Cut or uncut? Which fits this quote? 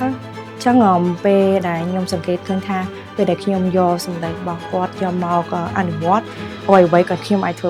uncut